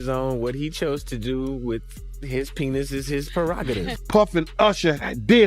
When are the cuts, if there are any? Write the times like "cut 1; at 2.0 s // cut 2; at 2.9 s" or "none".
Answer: cut 1; at 4.0 s